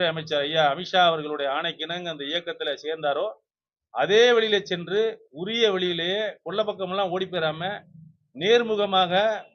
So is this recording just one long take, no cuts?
yes; 0 cuts

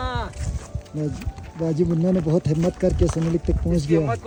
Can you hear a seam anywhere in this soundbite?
no; 0 cuts

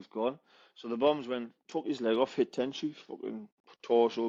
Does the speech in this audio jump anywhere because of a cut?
no; 0 cuts

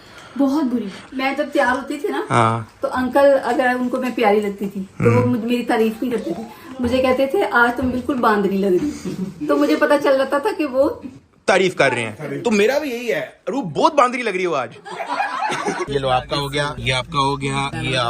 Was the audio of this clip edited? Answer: yes; 2 cuts; at 1.0 s, 15.8 s

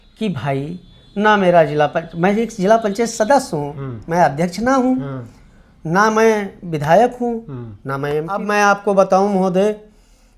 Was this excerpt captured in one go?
no; 1 cut; at 8.4 s

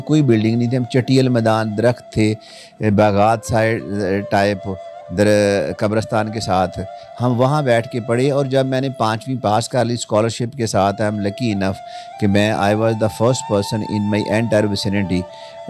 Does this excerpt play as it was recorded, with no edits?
yes; 0 cuts

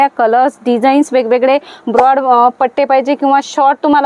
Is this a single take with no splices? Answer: yes; 0 cuts

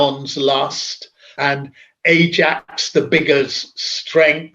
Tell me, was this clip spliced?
yes; 1 cut; at 1.4 s

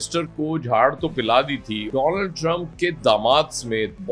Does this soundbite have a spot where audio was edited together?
yes; 1 cut; at 1.8 s

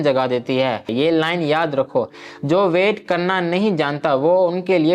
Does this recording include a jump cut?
yes; 1 cut; at 0.9 s

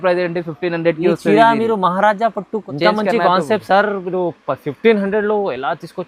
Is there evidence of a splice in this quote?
yes; 1 cut; at 2.7 s

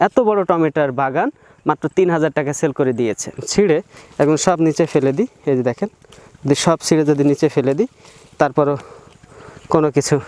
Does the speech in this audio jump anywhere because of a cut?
yes; 1 cut; at 3.5 s

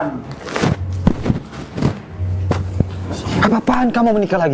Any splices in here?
no; 0 cuts

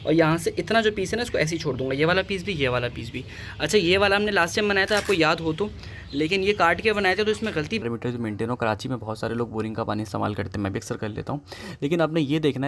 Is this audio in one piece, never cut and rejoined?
no; 1 cut; at 7.8 s

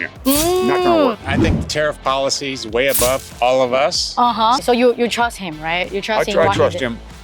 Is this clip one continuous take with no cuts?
no; 3 cuts; at 1.2 s, 2.6 s, 4.6 s

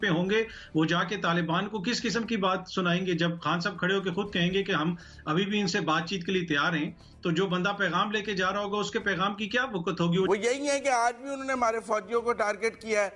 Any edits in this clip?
yes; 1 cut; at 10.3 s

